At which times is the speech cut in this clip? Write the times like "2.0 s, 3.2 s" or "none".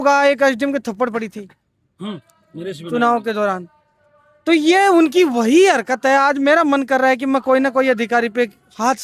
none